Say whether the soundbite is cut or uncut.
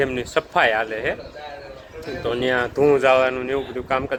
uncut